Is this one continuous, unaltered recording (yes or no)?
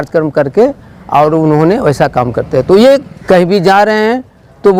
no